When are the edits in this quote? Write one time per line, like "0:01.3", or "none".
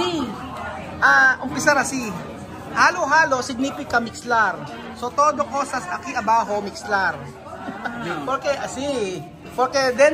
none